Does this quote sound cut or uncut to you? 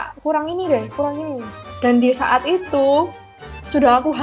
uncut